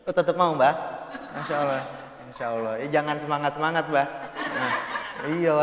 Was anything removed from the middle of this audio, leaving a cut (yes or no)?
no